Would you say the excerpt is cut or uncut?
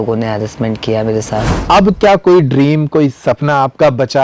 cut